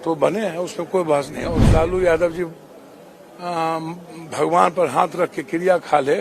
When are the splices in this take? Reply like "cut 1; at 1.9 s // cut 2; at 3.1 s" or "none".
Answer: cut 1; at 1.6 s